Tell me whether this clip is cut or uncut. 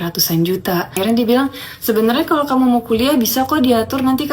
cut